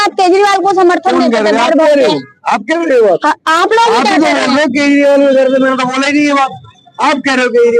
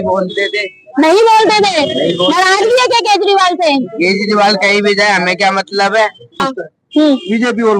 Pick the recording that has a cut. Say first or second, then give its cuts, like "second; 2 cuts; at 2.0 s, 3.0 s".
second; 1 cut; at 6.5 s